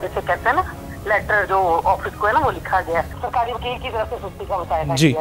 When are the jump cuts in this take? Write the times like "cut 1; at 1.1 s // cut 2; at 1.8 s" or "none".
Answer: cut 1; at 3.1 s